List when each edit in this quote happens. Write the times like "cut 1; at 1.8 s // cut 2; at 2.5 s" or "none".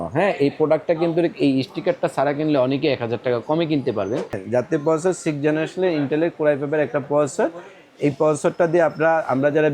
cut 1; at 4.4 s